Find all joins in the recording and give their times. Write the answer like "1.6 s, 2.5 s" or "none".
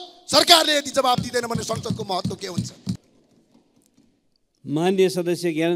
3.1 s